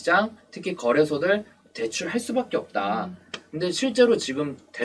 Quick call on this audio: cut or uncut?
uncut